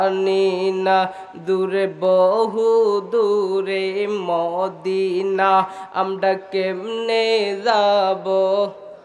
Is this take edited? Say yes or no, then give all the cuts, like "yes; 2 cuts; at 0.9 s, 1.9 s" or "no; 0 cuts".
no; 0 cuts